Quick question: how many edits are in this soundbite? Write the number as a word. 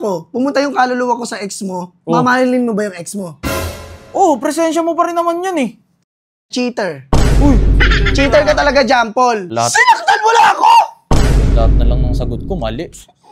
one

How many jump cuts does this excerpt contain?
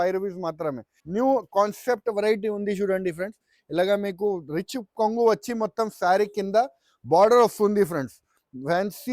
one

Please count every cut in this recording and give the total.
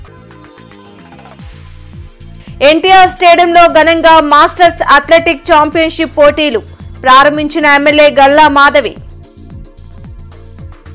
one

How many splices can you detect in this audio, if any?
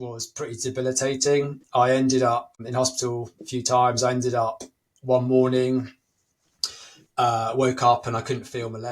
one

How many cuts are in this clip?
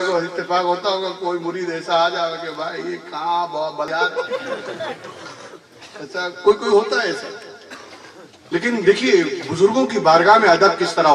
one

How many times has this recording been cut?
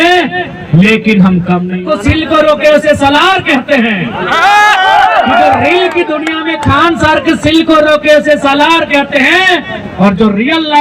one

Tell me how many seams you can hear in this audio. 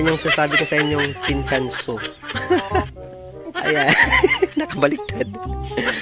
one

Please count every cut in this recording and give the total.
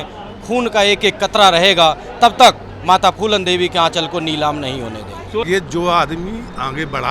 one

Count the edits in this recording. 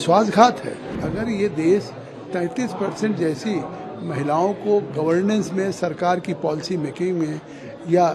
one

